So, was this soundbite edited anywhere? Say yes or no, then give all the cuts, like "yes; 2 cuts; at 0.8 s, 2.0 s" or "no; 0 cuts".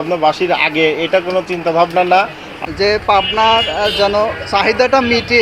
yes; 1 cut; at 2.5 s